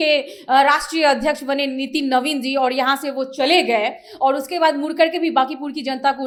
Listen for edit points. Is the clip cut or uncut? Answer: uncut